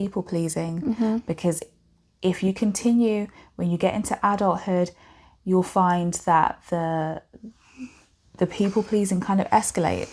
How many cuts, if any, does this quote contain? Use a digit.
0